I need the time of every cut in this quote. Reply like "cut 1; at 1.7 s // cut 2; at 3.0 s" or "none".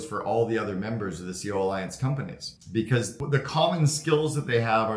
none

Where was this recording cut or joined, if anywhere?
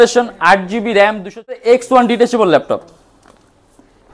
cut 1; at 1.5 s

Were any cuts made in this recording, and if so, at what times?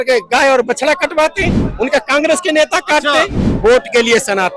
cut 1; at 3.4 s

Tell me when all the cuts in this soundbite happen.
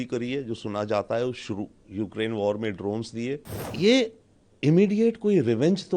cut 1; at 3.6 s

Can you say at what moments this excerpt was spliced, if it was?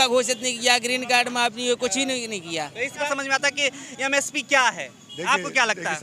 cut 1; at 3.1 s

